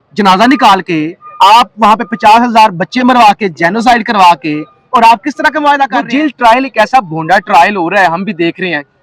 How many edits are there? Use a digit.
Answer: 1